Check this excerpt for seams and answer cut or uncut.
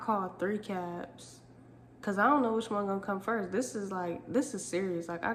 uncut